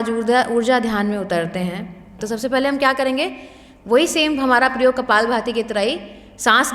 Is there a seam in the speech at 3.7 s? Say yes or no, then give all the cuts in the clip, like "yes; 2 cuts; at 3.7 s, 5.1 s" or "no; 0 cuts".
no; 1 cut; at 2.1 s